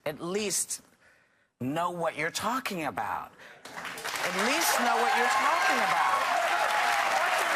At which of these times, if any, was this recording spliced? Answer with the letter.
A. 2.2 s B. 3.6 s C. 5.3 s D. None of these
D